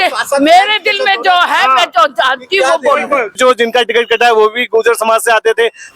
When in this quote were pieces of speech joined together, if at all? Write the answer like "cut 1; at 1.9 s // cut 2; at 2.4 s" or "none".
cut 1; at 3.3 s